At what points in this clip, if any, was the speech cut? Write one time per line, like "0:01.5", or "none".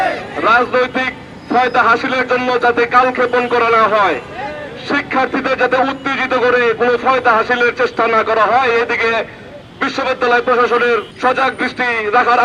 0:11.1